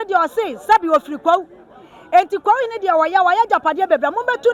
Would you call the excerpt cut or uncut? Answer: uncut